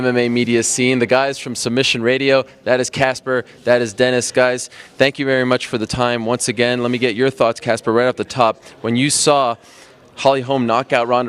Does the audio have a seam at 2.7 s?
yes; 1 cut; at 2.7 s

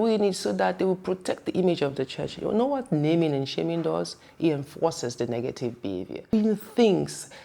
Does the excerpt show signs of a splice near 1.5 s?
no; 1 cut; at 6.3 s

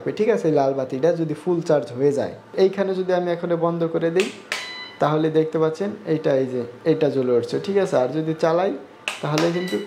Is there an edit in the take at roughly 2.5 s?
yes; 1 cut; at 2.5 s

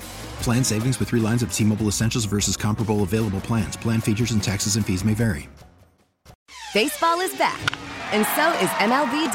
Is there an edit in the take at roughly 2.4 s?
no; 1 cut; at 6.4 s

